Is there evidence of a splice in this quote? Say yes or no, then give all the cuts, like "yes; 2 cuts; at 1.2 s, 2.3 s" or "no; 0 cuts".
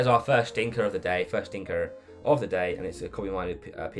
no; 0 cuts